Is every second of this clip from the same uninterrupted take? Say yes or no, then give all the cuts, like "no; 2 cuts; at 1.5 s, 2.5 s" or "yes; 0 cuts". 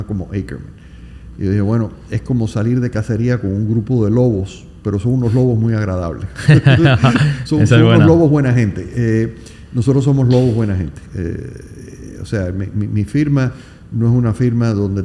yes; 0 cuts